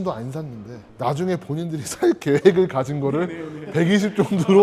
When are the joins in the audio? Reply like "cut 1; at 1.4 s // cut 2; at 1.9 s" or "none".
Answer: none